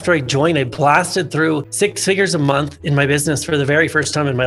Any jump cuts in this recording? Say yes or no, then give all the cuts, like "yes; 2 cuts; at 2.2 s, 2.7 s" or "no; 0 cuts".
no; 0 cuts